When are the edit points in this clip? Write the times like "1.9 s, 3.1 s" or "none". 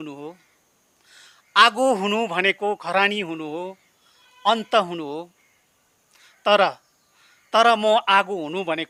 none